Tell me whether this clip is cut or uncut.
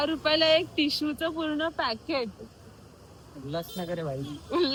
uncut